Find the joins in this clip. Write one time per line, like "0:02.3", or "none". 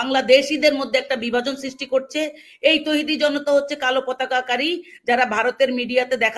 none